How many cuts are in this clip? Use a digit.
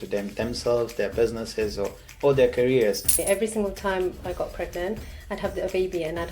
1